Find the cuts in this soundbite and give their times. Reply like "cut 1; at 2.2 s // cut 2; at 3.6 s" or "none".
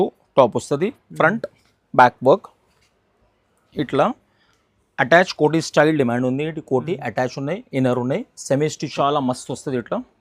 cut 1; at 8.9 s